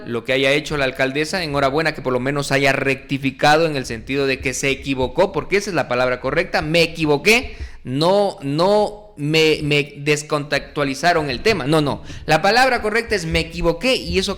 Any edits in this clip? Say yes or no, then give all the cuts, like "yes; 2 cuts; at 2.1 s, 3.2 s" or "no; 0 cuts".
no; 0 cuts